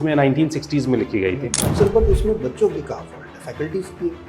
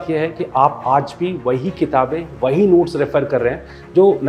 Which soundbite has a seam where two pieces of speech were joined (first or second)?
first